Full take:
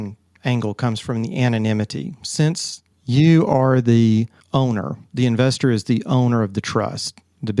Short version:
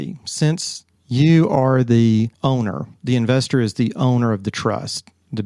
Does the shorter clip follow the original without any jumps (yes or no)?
no